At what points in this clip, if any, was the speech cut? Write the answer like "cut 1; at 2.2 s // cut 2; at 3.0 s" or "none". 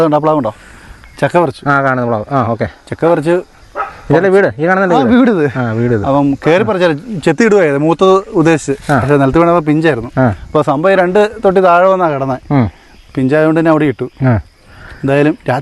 none